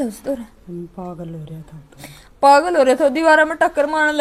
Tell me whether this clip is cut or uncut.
uncut